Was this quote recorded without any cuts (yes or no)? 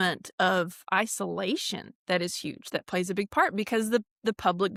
yes